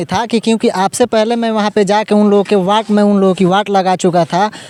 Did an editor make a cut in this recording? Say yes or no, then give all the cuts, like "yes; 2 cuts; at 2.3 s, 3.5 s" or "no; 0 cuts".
no; 0 cuts